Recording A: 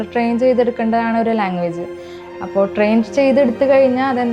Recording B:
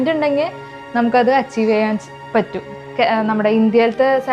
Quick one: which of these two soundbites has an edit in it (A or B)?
B